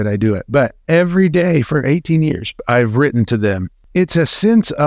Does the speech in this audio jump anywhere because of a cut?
yes; 2 cuts; at 2.6 s, 3.7 s

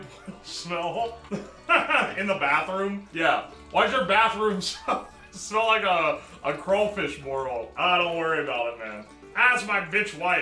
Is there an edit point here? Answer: yes; 2 cuts; at 3.1 s, 7.7 s

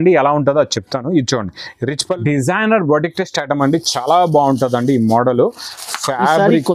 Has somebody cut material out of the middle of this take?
yes; 1 cut; at 2.2 s

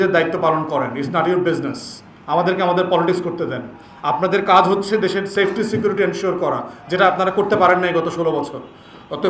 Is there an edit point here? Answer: yes; 1 cut; at 1.0 s

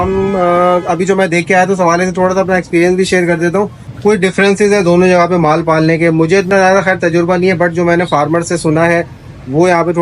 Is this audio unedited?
no; 1 cut; at 3.8 s

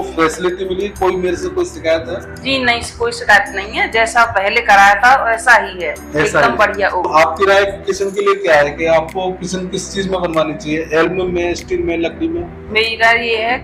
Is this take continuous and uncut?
no; 1 cut; at 7.1 s

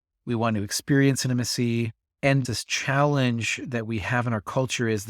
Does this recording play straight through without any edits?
no; 1 cut; at 2.4 s

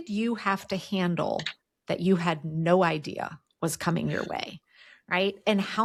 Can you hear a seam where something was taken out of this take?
no; 0 cuts

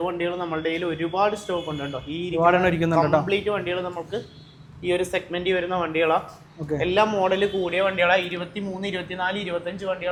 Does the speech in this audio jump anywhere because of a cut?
no; 0 cuts

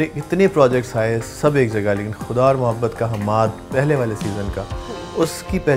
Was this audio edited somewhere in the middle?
no; 0 cuts

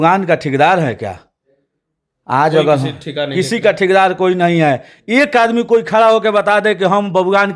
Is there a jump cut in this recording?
no; 0 cuts

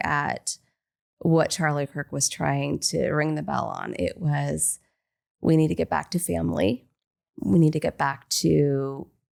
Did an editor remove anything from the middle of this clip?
no; 0 cuts

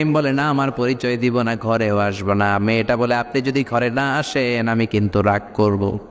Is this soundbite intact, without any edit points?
yes; 0 cuts

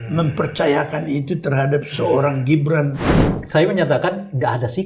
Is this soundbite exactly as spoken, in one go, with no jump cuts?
no; 1 cut; at 3.0 s

